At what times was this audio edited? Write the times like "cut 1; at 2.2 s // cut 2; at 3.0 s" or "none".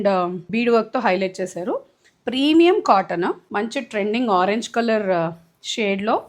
cut 1; at 3.4 s